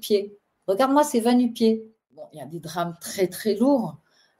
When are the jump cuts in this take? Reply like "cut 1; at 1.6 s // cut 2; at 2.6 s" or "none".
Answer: cut 1; at 2.2 s